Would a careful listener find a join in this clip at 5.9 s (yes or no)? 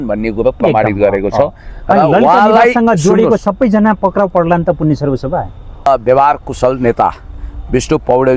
yes